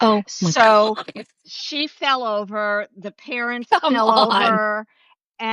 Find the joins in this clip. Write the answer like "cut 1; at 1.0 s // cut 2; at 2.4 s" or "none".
none